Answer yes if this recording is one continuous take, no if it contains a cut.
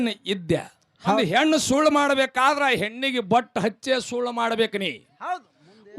no